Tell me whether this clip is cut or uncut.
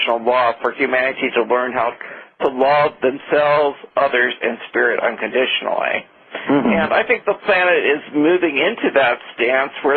uncut